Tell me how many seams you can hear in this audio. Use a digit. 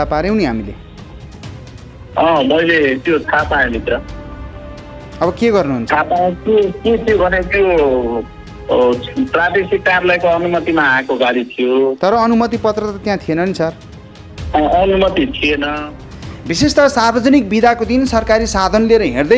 1